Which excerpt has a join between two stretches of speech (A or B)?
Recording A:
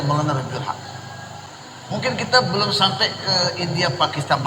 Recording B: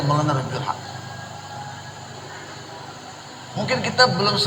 A